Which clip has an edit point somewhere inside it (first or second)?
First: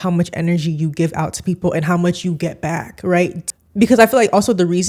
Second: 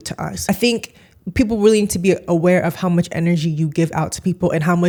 first